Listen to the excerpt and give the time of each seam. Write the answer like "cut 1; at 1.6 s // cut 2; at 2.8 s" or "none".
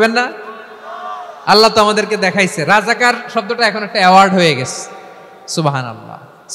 none